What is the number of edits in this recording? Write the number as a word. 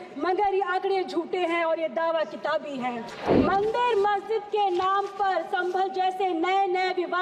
one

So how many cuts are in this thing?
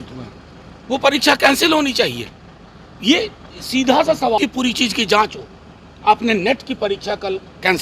one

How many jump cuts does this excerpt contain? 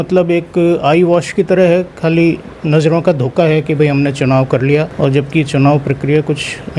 zero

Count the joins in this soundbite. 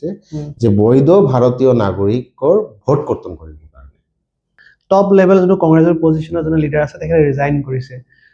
one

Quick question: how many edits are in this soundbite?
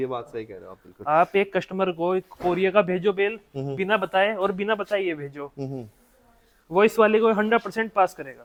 zero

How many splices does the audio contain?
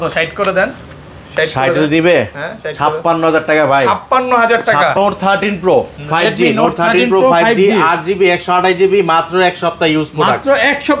one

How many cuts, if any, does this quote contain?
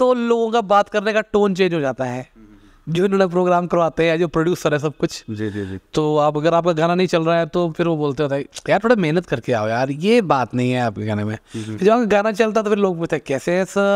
zero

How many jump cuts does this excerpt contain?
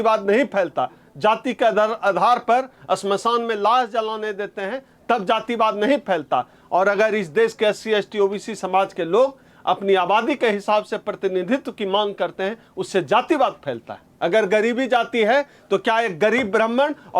two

